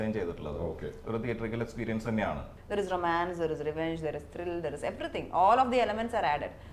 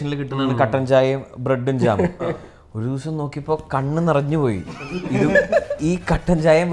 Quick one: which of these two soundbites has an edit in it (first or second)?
first